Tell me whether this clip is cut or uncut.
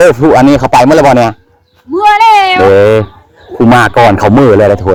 uncut